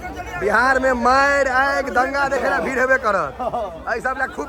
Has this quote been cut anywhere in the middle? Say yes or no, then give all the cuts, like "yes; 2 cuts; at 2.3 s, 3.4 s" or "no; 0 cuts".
no; 0 cuts